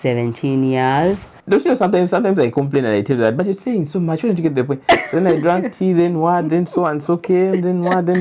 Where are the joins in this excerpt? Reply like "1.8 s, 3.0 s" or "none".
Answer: 1.3 s